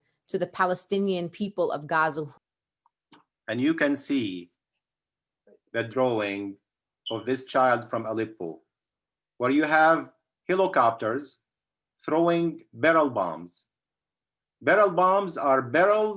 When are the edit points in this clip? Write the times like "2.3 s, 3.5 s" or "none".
2.3 s